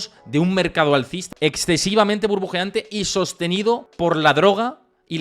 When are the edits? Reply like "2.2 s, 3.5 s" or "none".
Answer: 1.2 s, 3.9 s